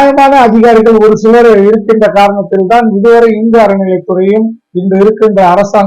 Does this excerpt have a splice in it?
no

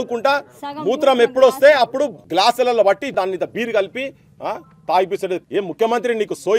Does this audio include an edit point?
yes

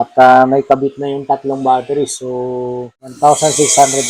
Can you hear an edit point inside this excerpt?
yes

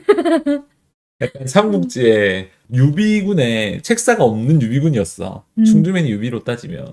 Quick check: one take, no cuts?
no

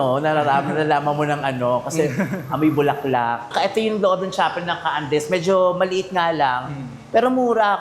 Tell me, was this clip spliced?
no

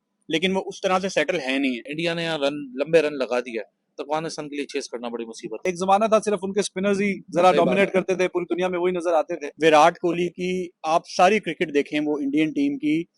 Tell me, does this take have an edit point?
yes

